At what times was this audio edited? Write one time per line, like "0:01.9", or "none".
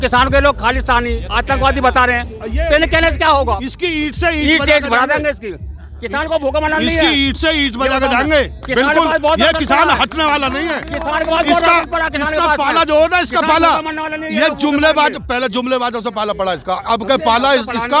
0:03.6